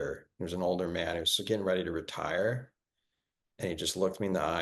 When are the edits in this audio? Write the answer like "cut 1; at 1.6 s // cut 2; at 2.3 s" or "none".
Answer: none

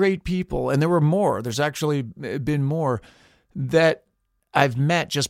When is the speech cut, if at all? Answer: cut 1; at 4.3 s

